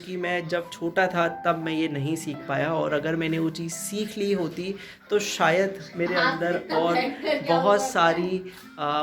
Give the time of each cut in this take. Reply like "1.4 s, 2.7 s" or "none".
none